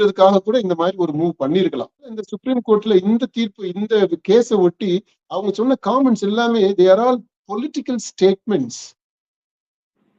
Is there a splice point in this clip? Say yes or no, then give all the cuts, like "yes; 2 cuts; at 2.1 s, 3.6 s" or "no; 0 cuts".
yes; 1 cut; at 2.3 s